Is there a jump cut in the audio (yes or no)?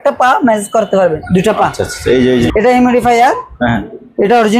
yes